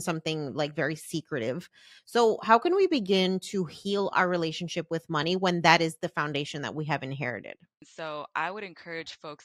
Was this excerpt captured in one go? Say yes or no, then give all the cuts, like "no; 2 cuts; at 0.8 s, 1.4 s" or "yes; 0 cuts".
no; 1 cut; at 7.8 s